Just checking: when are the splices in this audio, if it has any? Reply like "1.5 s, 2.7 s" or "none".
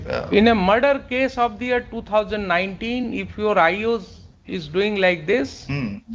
none